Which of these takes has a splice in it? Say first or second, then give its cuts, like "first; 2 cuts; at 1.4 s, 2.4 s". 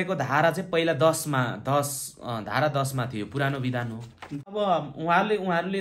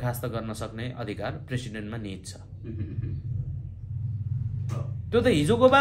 first; 1 cut; at 4.5 s